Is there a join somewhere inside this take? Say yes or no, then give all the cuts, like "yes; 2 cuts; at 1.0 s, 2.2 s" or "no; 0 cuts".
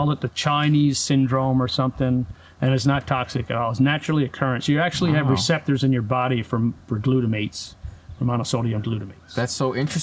no; 0 cuts